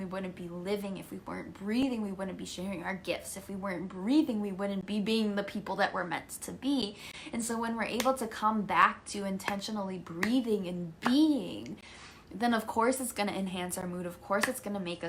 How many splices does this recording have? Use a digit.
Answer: 0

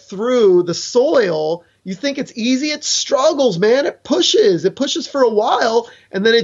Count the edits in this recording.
0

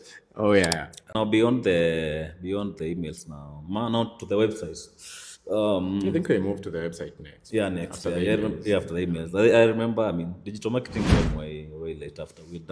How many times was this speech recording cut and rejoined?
1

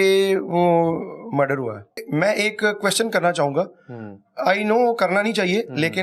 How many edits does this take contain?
1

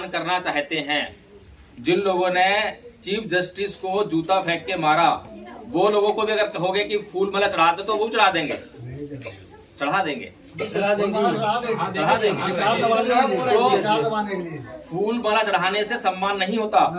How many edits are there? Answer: 0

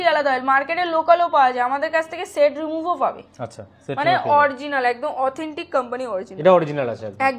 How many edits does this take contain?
0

